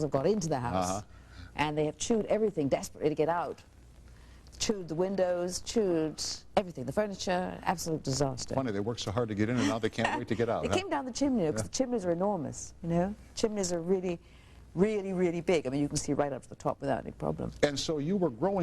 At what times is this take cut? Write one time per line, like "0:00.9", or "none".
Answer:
0:11.1